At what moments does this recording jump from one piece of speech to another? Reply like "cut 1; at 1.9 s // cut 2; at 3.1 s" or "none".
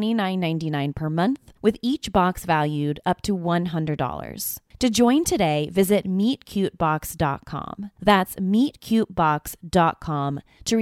cut 1; at 1.5 s